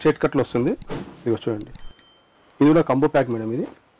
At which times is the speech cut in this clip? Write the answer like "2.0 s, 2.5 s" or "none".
none